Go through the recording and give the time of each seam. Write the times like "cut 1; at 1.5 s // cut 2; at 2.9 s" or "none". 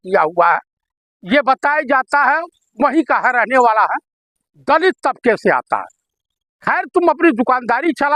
none